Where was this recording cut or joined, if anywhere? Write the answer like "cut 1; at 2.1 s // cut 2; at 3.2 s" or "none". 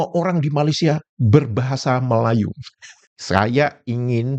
cut 1; at 3.1 s